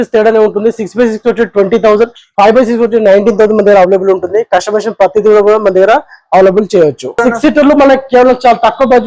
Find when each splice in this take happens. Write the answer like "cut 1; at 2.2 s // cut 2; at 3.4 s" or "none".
cut 1; at 7.2 s